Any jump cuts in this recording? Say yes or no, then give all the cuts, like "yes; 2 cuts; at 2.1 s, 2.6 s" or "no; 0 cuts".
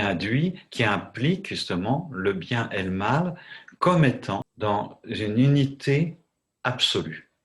yes; 1 cut; at 4.5 s